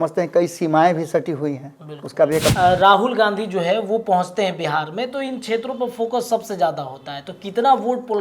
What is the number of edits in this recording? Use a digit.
1